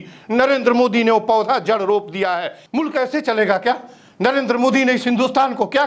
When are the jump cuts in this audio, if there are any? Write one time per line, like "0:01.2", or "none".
0:02.6